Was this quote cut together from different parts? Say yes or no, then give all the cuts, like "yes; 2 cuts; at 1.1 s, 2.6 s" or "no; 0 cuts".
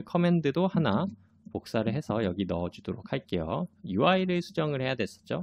no; 0 cuts